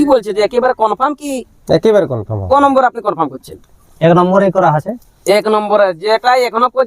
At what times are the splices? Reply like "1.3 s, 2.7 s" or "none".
2.4 s